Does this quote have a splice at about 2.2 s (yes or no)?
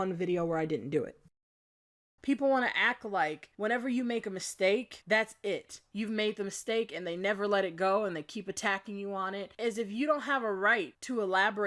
yes